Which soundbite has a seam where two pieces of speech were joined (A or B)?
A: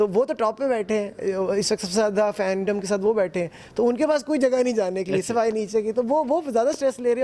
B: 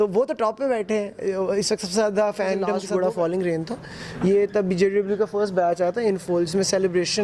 B